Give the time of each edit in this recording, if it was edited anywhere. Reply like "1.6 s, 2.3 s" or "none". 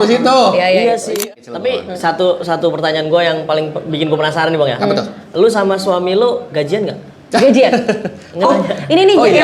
1.1 s